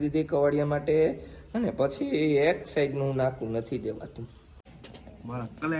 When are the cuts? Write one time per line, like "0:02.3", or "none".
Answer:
0:04.8

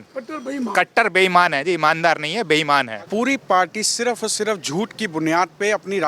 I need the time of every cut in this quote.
0:03.0

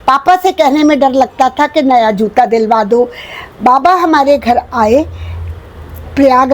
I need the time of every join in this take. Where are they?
none

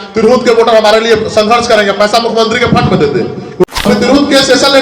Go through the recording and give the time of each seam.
0:03.6

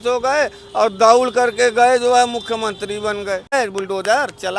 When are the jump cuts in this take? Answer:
0:03.5

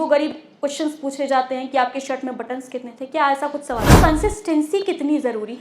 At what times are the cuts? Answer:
0:04.0

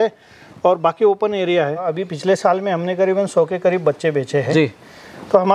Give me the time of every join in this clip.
0:01.9

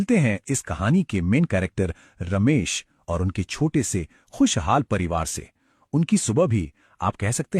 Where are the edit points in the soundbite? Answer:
0:01.2

